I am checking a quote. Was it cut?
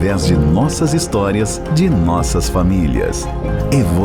no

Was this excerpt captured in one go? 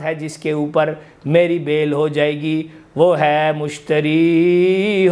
yes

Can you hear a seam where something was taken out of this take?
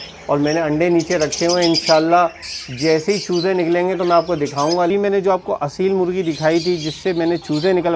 yes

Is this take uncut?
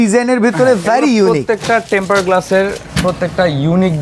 yes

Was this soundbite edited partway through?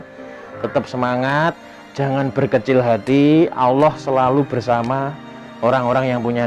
no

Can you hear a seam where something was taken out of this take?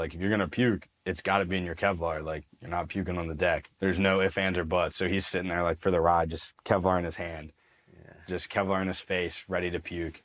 no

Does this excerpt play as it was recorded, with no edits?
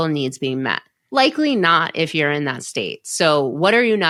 yes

